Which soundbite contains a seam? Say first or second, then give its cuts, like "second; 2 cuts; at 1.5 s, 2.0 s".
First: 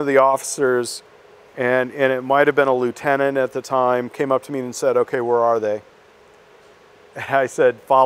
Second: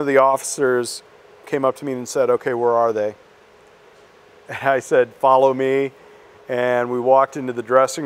second; 1 cut; at 1.4 s